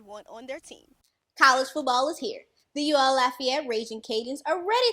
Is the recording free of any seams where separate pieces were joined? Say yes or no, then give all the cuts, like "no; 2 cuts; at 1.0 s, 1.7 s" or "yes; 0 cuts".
no; 1 cut; at 1.2 s